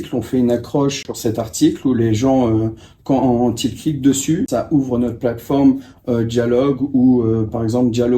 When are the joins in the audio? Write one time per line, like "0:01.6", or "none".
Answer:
0:01.0
0:04.5

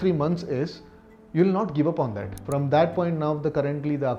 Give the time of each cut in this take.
0:02.3

